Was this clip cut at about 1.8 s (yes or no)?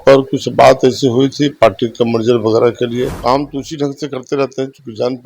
no